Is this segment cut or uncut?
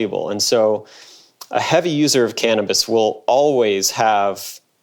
uncut